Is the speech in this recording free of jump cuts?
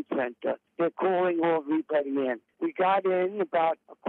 no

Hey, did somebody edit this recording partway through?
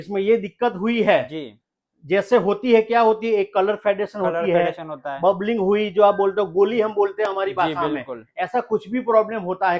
no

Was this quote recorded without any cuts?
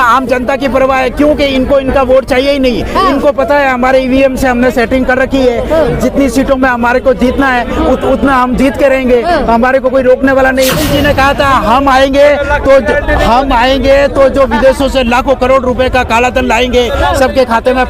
no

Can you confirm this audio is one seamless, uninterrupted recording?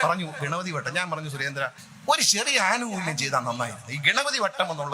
no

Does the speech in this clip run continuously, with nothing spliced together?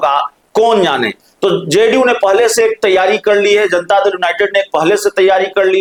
yes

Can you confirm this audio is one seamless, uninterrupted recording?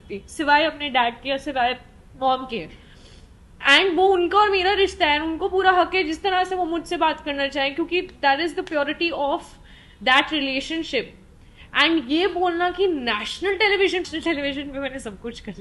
no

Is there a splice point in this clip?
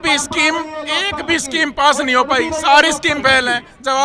no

